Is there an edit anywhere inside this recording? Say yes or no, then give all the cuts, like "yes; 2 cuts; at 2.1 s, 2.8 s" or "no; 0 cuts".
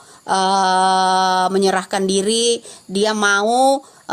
no; 0 cuts